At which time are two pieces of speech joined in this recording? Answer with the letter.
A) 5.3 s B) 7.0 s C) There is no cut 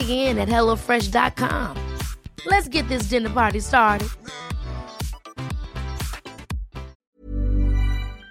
B